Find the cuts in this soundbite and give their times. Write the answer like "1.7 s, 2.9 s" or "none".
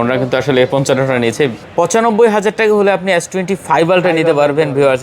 1.6 s